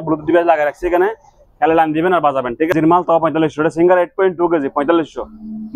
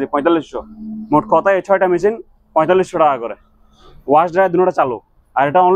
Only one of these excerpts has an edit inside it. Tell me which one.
first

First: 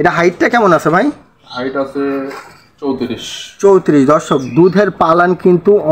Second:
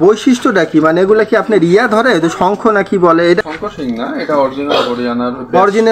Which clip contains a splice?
second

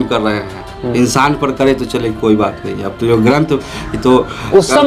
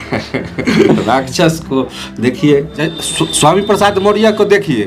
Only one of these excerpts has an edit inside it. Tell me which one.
second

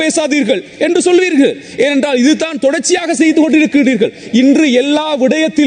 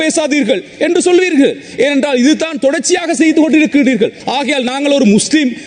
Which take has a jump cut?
second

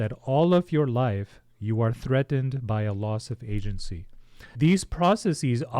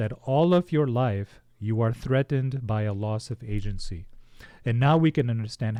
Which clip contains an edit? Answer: first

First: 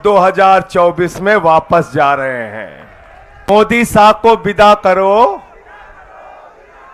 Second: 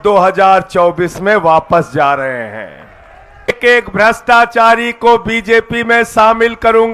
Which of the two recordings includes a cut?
second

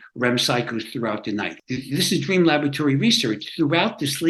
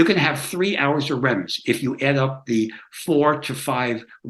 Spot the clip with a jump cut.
first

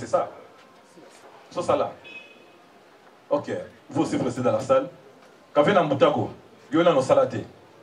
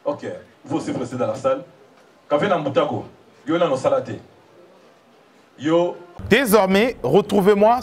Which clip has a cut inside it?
second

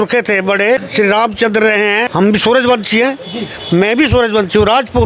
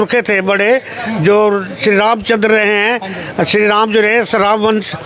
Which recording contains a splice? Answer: first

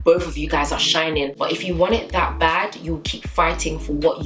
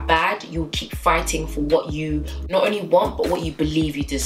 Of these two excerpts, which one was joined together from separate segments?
first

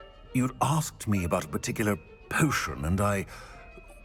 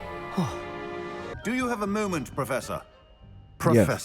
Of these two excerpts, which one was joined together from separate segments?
second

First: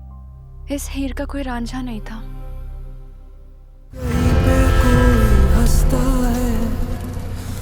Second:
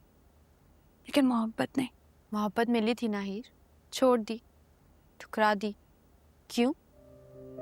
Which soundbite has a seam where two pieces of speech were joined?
first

